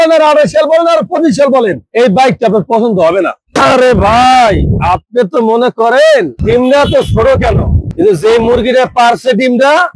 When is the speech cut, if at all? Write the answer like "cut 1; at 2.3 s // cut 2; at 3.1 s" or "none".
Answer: cut 1; at 1.8 s // cut 2; at 3.4 s

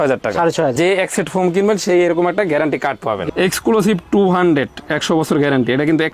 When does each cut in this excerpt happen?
cut 1; at 0.7 s // cut 2; at 3.2 s

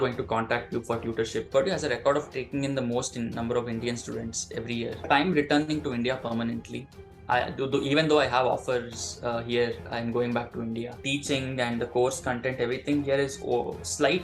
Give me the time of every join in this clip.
cut 1; at 1.5 s // cut 2; at 5.1 s // cut 3; at 11.1 s

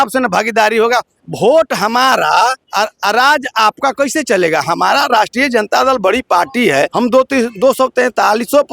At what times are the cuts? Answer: cut 1; at 2.6 s // cut 2; at 6.9 s

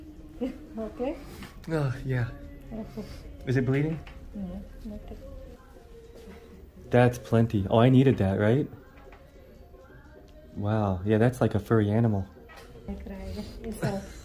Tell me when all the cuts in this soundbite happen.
cut 1; at 5.5 s // cut 2; at 13.0 s

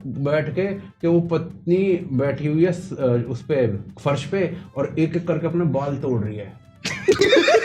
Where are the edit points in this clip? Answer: none

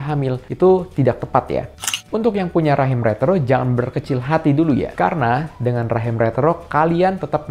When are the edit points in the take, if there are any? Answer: cut 1; at 1.7 s

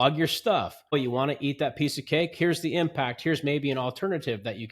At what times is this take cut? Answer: cut 1; at 0.9 s

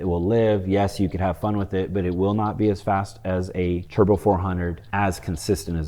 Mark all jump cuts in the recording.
cut 1; at 3.9 s // cut 2; at 4.8 s

